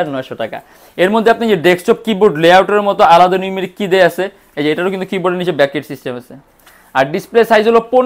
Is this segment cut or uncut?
uncut